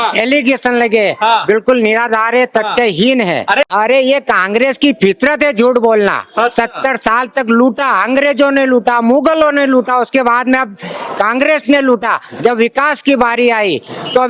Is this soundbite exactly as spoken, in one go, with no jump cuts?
no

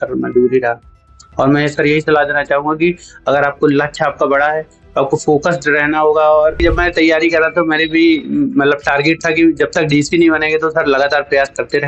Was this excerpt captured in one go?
no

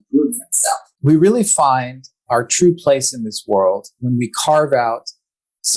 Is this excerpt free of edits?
no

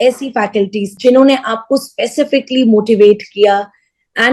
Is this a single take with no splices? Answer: no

